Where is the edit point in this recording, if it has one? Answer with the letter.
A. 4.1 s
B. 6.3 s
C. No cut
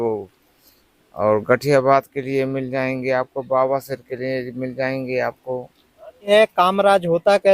B